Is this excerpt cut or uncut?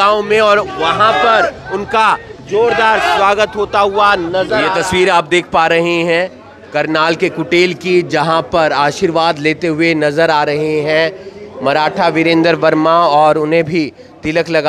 cut